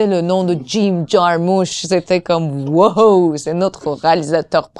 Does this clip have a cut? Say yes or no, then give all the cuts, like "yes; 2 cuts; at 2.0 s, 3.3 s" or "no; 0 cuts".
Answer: no; 0 cuts